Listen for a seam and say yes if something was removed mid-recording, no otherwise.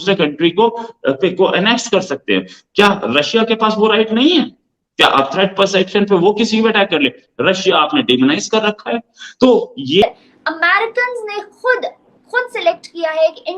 yes